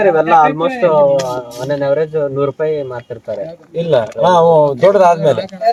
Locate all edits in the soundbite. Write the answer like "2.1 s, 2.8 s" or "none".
none